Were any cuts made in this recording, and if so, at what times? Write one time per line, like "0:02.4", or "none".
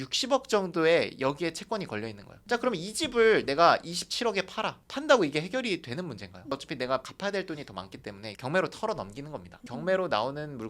0:06.5
0:09.4